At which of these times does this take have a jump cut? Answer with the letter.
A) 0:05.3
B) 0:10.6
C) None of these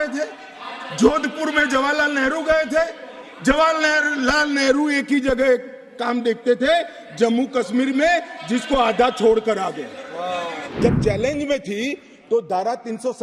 B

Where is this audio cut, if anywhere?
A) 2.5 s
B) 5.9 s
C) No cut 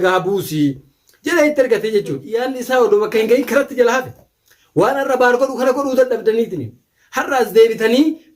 A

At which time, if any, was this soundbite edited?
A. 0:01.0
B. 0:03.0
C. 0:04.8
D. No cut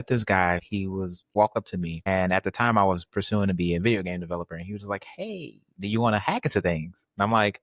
A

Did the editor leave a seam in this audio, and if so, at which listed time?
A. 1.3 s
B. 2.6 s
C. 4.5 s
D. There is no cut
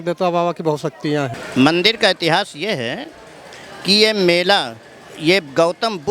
A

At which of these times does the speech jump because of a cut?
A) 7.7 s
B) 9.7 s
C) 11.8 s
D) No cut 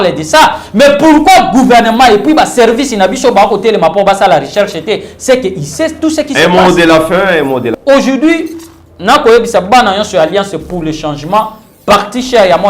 A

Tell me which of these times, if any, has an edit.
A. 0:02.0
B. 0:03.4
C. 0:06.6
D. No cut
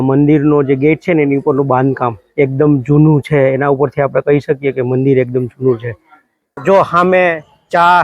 C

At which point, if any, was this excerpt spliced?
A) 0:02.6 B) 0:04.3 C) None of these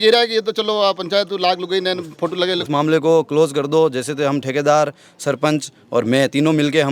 A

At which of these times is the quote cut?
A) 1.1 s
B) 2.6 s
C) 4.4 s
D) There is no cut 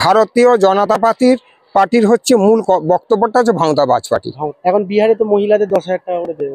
D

